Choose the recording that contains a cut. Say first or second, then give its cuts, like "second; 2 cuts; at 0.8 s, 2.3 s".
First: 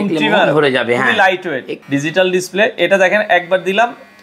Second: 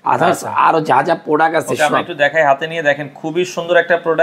first; 1 cut; at 1.7 s